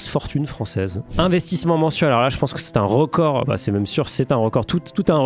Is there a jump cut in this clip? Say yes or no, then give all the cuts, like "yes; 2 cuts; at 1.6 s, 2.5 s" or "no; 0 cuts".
yes; 1 cut; at 1.0 s